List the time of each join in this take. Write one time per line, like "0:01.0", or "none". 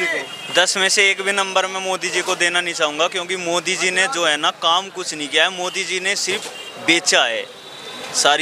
none